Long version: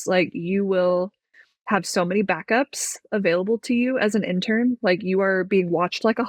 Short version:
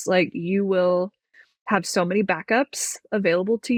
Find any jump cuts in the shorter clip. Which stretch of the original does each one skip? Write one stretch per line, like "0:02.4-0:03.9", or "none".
none